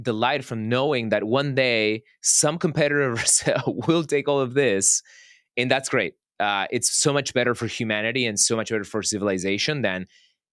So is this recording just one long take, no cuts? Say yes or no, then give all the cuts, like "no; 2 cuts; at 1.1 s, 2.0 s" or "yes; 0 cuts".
yes; 0 cuts